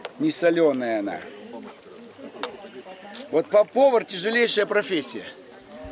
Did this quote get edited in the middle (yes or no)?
no